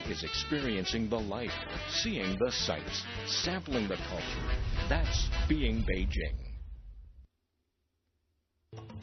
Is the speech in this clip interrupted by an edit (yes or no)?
no